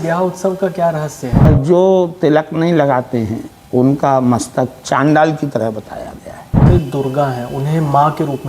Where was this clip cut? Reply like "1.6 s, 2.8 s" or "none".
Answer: 1.5 s, 6.6 s